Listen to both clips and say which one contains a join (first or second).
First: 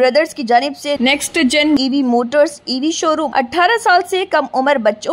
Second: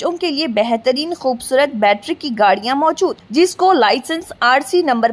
first